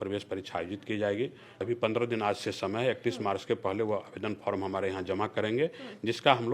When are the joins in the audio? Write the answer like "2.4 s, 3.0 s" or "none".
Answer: 1.5 s